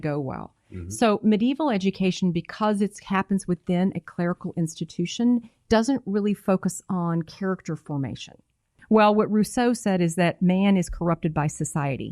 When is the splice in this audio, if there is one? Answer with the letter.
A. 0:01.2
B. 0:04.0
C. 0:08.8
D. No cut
C